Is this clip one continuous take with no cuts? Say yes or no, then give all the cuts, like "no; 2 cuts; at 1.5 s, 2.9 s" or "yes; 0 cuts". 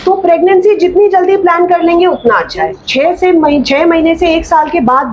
no; 1 cut; at 2.8 s